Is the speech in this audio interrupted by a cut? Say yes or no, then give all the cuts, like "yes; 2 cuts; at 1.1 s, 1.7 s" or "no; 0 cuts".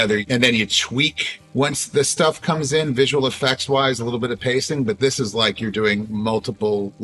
no; 0 cuts